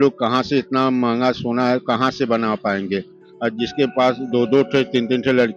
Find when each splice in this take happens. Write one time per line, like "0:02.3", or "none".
none